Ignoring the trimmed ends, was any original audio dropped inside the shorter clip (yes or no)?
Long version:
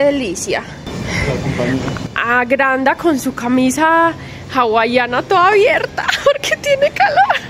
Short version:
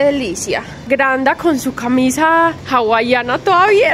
yes